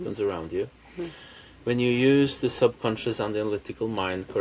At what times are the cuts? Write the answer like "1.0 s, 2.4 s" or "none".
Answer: none